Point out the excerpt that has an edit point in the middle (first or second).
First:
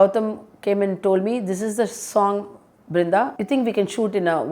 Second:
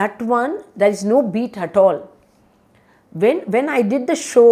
first